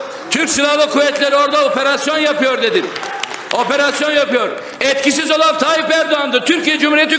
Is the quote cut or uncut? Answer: uncut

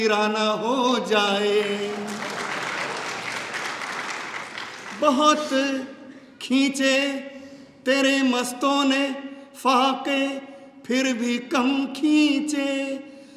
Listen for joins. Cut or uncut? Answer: uncut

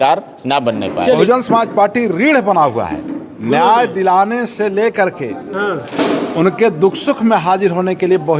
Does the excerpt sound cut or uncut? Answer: cut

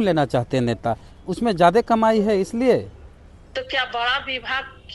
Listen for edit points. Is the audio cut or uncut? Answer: cut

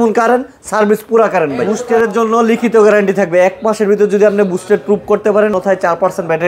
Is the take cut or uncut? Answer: cut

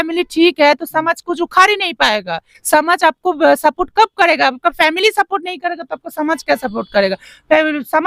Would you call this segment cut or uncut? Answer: uncut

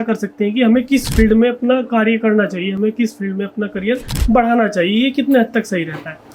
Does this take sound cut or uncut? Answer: uncut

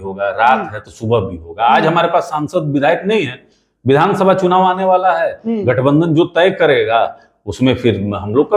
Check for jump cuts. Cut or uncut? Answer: uncut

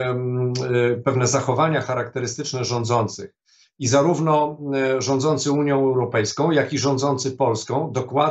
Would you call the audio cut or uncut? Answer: uncut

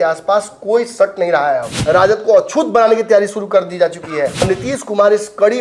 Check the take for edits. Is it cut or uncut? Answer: cut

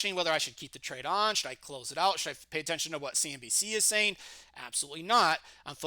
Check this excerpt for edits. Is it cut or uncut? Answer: uncut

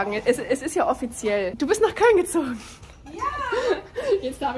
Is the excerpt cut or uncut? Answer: uncut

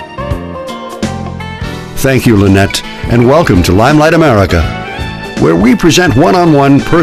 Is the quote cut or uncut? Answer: uncut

